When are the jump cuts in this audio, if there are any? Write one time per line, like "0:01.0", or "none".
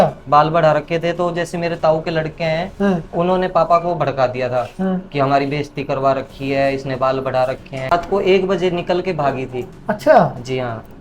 0:07.9